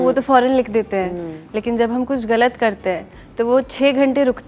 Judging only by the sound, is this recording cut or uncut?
uncut